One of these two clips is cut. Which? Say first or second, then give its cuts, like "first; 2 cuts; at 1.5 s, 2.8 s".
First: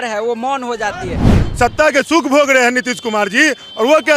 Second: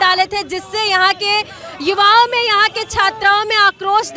first; 1 cut; at 1.4 s